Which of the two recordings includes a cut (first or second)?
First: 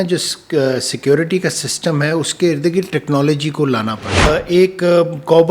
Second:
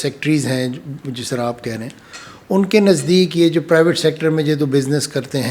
first